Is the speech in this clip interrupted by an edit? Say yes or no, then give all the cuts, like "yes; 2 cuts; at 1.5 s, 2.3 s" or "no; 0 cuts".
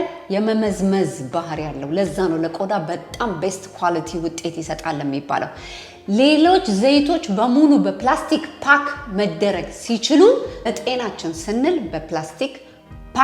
yes; 1 cut; at 10.7 s